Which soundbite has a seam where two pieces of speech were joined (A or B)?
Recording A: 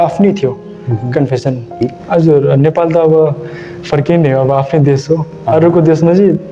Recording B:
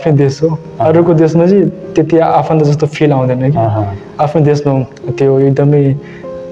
A